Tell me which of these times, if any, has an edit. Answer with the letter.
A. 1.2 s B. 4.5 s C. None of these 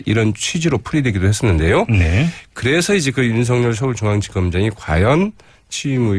B